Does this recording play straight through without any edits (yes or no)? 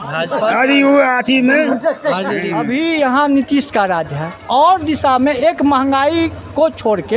no